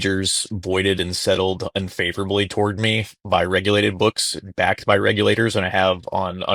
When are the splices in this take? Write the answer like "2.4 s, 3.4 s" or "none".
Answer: none